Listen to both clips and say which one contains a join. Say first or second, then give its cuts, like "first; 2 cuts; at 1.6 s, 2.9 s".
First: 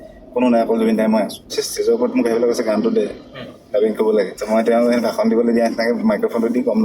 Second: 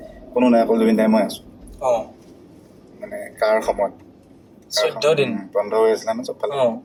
first; 2 cuts; at 1.6 s, 4.4 s